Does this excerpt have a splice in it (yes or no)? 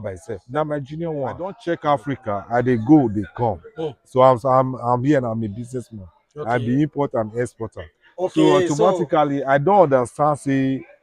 yes